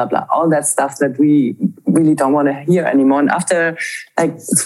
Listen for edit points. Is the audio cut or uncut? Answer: uncut